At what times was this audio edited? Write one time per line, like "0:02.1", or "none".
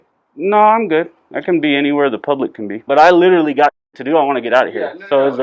0:02.8